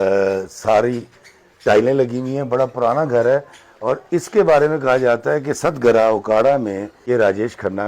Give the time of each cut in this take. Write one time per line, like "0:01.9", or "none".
0:06.9